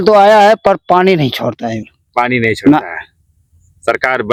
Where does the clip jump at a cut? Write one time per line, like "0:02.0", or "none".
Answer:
none